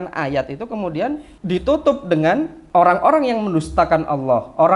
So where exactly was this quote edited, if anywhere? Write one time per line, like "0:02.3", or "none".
0:01.3
0:02.6